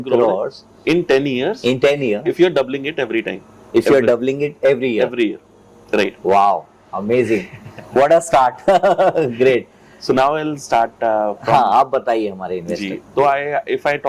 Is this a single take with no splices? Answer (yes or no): yes